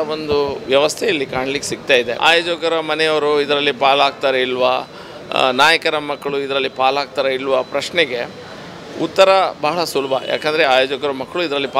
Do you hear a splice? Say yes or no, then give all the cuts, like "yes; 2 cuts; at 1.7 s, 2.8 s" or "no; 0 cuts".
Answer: yes; 1 cut; at 2.1 s